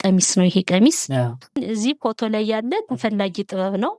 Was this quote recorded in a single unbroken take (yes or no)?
no